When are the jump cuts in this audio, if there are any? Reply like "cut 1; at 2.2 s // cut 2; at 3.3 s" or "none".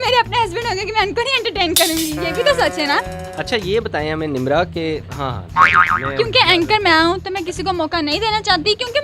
cut 1; at 3.2 s